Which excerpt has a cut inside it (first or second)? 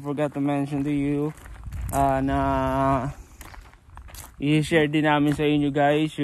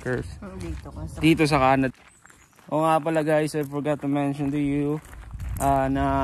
second